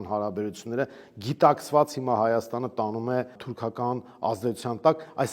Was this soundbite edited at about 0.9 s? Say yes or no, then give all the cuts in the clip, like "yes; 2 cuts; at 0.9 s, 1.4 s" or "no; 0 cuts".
no; 1 cut; at 3.5 s